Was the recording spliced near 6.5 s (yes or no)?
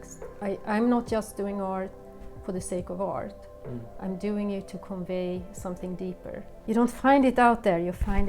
yes